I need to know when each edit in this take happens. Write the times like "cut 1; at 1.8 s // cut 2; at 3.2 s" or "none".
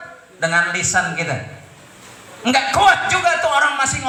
none